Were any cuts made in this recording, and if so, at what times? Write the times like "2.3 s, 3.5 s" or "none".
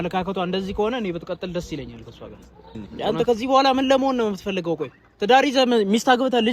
2.9 s